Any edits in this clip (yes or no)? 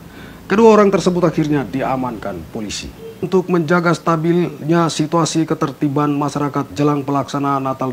yes